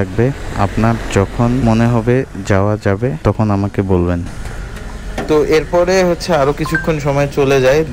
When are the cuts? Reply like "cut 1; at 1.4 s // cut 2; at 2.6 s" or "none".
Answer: cut 1; at 1.6 s // cut 2; at 3.2 s